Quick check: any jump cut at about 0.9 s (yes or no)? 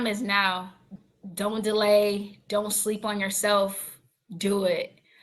yes